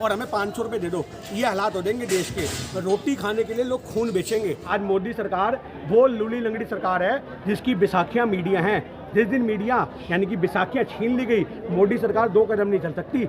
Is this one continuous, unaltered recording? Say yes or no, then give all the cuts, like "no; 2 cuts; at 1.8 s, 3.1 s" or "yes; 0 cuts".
no; 1 cut; at 4.6 s